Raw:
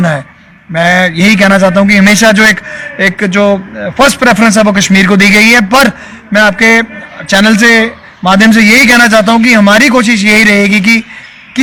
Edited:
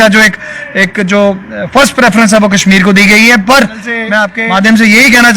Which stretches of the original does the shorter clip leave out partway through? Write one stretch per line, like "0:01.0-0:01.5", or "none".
0:06.6-0:08.1